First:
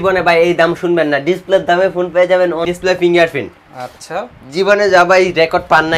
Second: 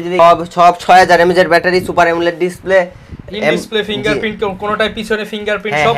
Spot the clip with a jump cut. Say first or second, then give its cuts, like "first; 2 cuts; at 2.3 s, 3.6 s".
first; 1 cut; at 2.7 s